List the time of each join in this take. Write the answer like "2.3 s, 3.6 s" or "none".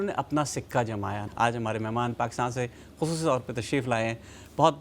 1.2 s